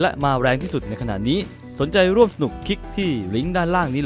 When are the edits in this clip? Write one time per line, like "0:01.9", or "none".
none